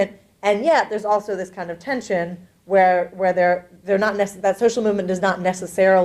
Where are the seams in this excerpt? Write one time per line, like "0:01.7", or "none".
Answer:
0:03.1